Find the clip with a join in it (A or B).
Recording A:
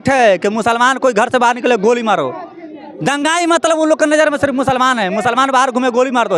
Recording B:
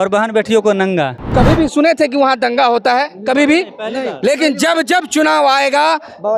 B